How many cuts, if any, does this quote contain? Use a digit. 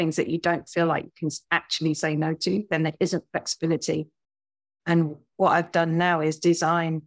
0